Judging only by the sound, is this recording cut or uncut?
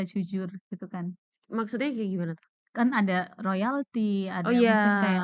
uncut